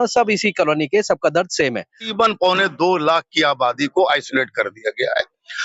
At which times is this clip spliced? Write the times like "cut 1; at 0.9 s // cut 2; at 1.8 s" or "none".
cut 1; at 2.0 s